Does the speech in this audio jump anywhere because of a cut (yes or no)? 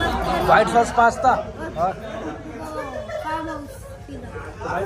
no